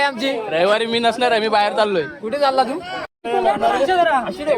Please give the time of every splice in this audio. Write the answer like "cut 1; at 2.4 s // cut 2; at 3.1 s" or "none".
cut 1; at 3.1 s